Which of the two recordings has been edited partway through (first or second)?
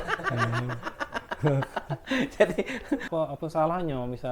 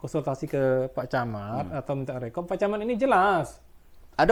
first